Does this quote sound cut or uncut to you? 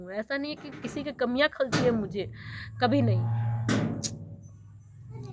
uncut